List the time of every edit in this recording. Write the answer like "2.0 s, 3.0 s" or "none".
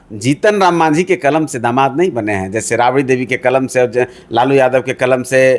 none